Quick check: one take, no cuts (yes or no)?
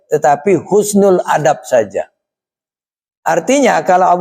yes